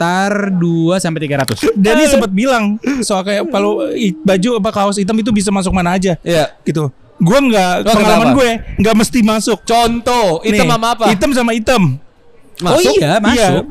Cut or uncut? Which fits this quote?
cut